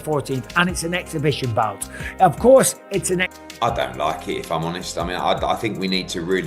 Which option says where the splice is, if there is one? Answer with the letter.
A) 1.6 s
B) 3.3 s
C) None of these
B